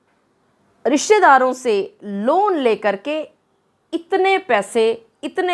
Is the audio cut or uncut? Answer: uncut